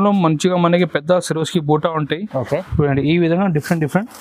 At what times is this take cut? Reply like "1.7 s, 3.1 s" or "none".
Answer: 2.6 s